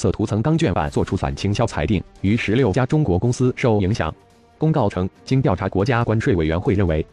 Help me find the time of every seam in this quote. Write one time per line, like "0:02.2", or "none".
0:02.1